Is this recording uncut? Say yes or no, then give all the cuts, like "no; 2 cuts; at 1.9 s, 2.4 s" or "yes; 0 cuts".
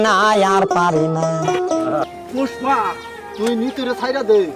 no; 1 cut; at 2.1 s